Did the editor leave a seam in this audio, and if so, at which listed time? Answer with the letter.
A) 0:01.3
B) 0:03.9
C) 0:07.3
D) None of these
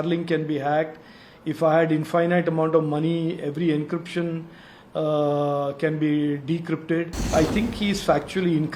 C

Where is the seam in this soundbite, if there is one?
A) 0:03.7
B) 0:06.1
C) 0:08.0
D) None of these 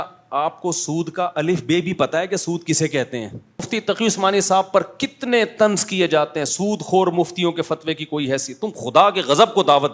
A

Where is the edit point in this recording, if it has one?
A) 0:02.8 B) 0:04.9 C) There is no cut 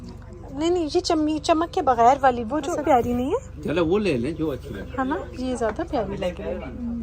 A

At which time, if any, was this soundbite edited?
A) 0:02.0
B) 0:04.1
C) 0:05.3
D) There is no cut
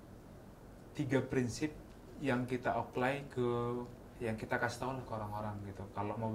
B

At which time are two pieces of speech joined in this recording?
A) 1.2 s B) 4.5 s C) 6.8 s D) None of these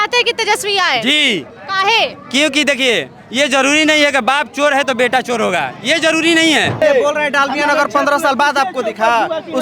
C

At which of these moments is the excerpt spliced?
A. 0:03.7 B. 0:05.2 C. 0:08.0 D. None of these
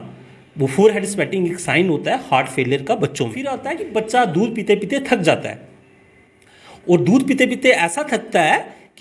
A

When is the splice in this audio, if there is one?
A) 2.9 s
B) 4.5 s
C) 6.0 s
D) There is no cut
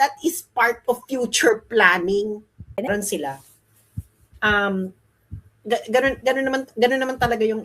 A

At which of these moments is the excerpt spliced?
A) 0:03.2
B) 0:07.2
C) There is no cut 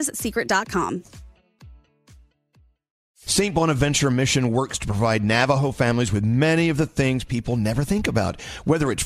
A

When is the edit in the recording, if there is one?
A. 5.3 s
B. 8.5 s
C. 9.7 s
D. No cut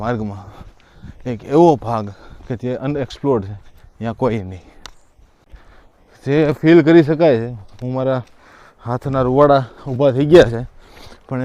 A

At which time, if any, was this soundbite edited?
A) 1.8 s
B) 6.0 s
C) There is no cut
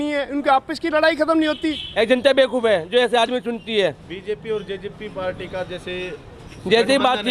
A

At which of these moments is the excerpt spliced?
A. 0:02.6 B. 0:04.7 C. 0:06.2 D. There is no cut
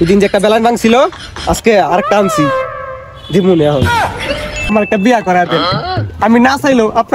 B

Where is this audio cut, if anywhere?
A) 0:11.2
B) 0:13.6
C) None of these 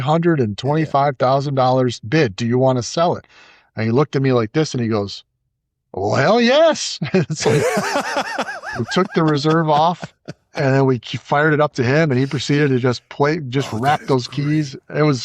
C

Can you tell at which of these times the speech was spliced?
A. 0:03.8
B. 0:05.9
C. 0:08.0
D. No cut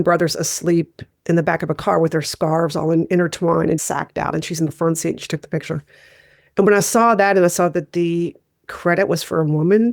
A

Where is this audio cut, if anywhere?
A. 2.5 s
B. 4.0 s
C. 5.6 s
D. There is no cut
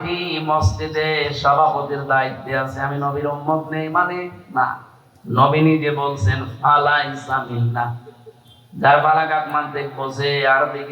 D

